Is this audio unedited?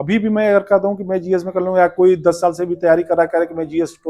yes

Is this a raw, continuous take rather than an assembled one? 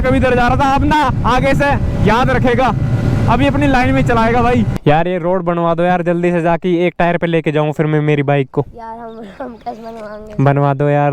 no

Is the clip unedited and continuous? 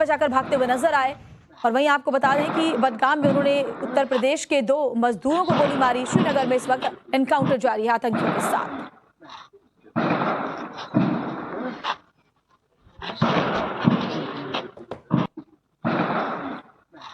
no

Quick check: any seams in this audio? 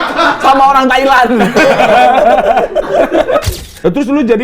yes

